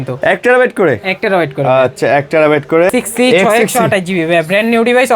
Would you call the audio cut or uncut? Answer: cut